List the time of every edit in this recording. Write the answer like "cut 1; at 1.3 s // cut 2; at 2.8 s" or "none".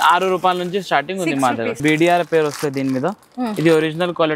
cut 1; at 1.8 s

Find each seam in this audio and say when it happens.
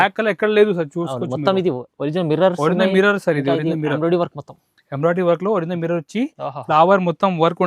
none

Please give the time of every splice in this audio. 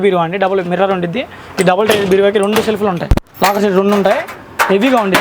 none

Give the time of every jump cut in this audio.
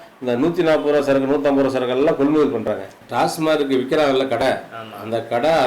cut 1; at 2.9 s

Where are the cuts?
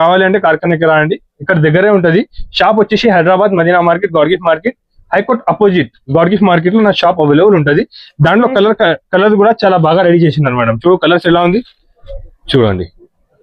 cut 1; at 12.3 s

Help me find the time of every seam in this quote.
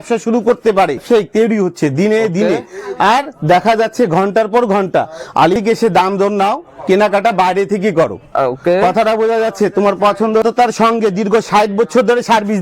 cut 1; at 1.0 s // cut 2; at 5.6 s // cut 3; at 10.4 s

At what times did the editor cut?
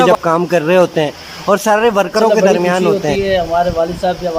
cut 1; at 3.0 s

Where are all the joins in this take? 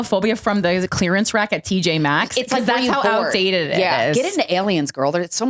none

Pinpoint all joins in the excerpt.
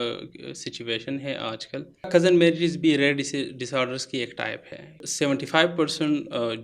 cut 1; at 2.1 s // cut 2; at 5.0 s

